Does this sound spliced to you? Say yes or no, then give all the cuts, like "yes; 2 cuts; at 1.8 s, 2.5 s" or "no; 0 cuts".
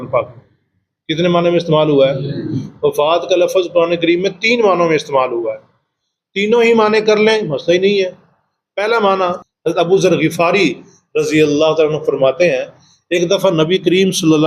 yes; 1 cut; at 9.4 s